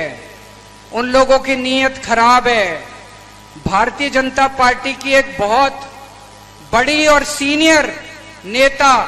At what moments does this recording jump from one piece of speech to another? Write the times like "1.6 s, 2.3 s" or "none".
none